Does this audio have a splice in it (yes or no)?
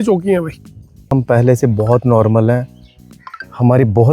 yes